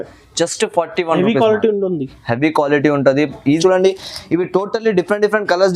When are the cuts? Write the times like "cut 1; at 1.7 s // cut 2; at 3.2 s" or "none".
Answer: cut 1; at 3.6 s